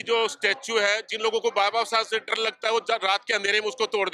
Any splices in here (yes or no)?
no